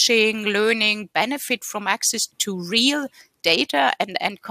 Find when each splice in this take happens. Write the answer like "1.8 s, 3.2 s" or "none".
2.4 s